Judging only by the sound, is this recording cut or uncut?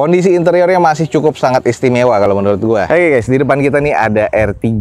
cut